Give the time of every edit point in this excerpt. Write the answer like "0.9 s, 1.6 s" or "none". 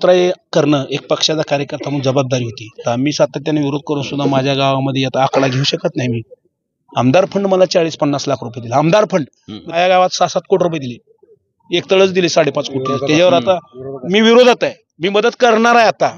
2.8 s, 9.7 s